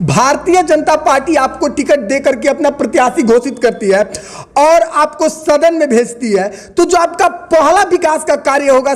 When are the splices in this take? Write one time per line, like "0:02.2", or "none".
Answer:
none